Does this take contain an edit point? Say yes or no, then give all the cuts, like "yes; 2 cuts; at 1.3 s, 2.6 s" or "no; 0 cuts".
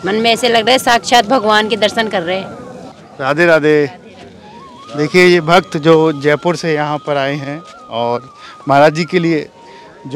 no; 0 cuts